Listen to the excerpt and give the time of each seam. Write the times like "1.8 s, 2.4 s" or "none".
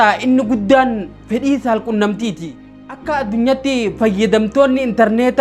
2.7 s